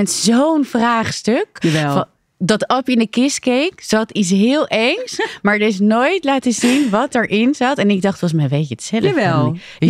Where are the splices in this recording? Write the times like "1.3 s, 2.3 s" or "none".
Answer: none